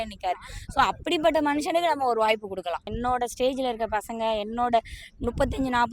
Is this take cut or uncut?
cut